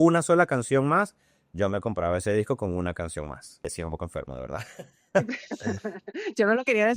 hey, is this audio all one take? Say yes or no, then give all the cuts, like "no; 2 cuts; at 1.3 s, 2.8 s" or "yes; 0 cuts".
no; 1 cut; at 3.7 s